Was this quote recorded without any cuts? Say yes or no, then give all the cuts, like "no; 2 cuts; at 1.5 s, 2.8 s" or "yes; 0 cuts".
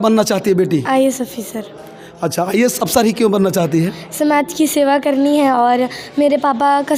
yes; 0 cuts